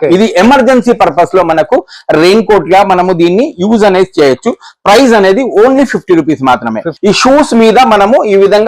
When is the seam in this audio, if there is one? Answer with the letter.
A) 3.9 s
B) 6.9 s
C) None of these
B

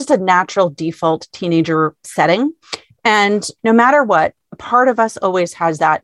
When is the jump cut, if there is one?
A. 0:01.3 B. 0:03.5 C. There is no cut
B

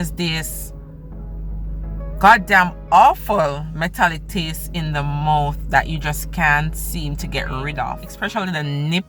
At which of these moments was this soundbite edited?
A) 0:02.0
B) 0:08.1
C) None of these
B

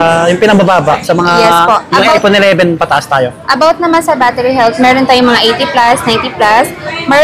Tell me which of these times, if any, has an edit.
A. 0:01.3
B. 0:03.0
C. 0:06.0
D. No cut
D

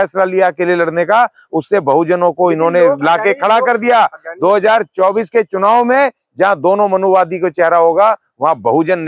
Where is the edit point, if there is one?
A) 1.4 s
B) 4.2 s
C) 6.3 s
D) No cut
D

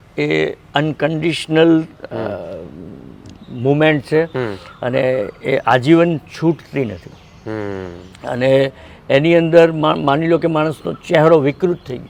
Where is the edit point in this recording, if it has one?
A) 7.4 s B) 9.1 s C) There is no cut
C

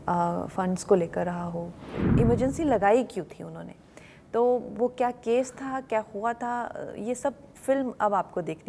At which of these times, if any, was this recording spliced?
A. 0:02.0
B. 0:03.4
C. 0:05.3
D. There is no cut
A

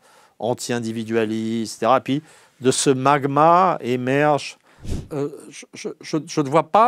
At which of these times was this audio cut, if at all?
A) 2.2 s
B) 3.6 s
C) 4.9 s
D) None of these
C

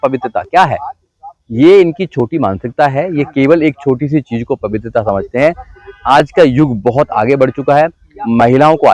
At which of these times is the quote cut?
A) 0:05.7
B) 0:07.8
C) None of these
C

